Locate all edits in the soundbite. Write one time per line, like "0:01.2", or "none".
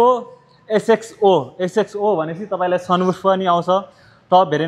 none